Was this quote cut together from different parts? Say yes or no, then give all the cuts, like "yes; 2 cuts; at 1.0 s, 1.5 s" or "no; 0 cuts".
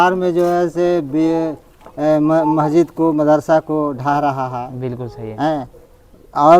no; 0 cuts